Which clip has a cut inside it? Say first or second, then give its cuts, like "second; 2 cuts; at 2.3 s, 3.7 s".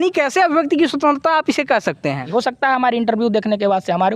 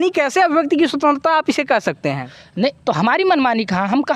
first; 1 cut; at 2.2 s